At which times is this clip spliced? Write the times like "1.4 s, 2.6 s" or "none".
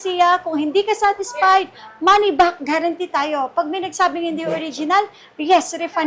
none